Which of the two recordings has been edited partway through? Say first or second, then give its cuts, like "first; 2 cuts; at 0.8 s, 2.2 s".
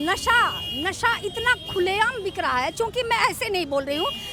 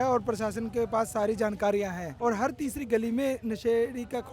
second; 1 cut; at 2.0 s